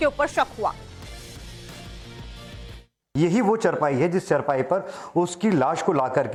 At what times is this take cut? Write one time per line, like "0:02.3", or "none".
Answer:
none